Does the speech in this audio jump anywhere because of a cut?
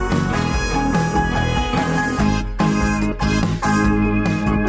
no; 0 cuts

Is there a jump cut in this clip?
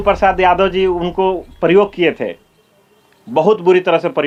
no; 0 cuts

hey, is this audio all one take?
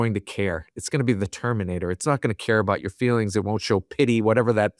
yes; 0 cuts

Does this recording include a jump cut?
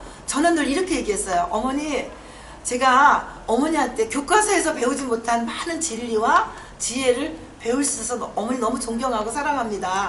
no; 0 cuts

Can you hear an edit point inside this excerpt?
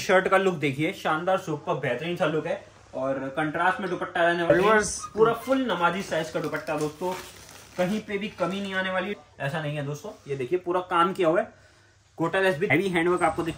yes; 3 cuts; at 4.5 s, 9.2 s, 12.7 s

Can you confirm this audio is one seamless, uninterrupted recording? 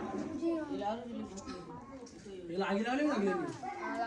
yes; 0 cuts

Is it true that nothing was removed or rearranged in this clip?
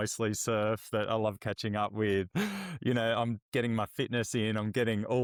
yes; 0 cuts

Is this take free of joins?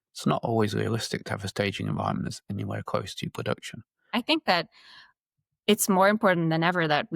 no; 1 cut; at 4.1 s

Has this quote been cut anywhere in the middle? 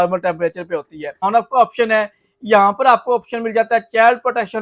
yes; 1 cut; at 1.2 s

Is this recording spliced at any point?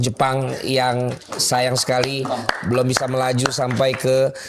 no; 0 cuts

